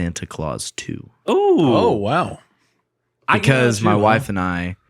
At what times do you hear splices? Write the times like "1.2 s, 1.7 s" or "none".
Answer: none